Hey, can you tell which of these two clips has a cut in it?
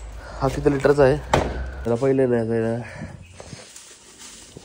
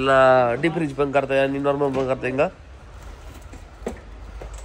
first; 1 cut; at 1.9 s

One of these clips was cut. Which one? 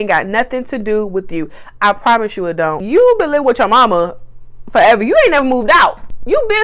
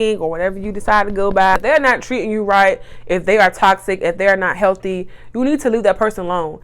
first; 1 cut; at 2.8 s

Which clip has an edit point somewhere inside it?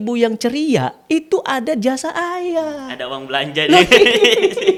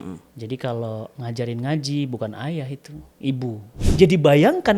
second; 1 cut; at 3.7 s

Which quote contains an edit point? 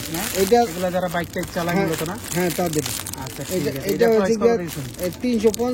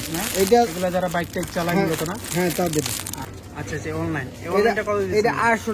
second; 1 cut; at 3.5 s

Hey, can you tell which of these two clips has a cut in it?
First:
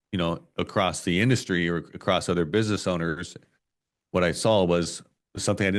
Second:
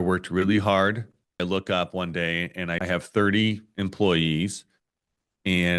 second; 2 cuts; at 1.4 s, 2.8 s

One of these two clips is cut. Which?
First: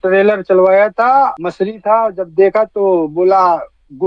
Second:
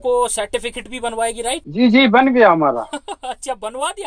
first; 1 cut; at 1.4 s

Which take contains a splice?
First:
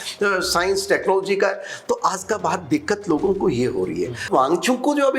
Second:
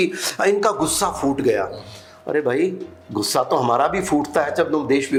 first; 1 cut; at 4.3 s

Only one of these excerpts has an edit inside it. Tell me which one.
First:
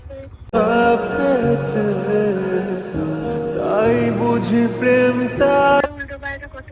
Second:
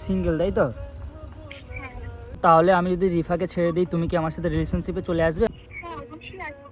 second; 2 cuts; at 2.4 s, 5.5 s

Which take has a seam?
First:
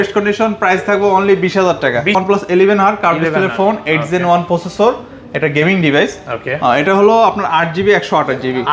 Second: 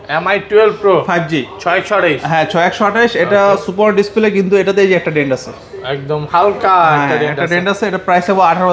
first; 1 cut; at 2.2 s

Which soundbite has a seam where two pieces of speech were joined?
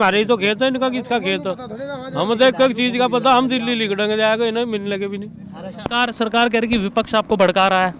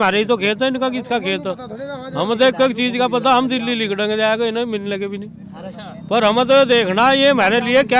first; 1 cut; at 5.8 s

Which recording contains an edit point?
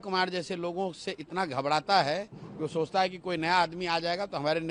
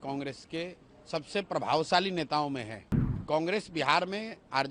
second; 1 cut; at 3.2 s

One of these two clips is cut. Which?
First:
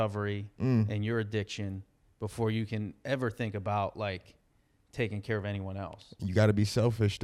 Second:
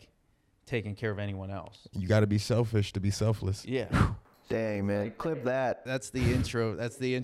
second; 1 cut; at 6.0 s

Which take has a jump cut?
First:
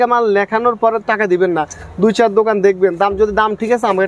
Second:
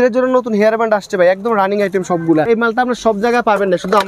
second; 1 cut; at 2.5 s

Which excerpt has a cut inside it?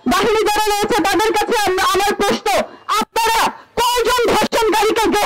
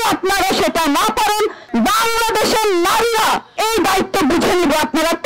second; 2 cuts; at 1.6 s, 3.5 s

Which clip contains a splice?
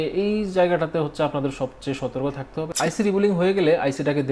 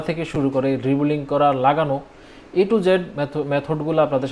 first; 1 cut; at 2.7 s

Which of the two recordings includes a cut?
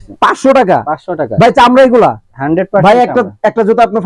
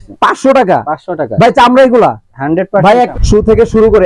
second; 1 cut; at 3.1 s

